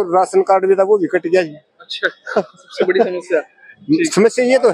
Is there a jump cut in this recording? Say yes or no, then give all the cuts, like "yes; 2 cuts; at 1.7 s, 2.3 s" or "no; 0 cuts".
no; 0 cuts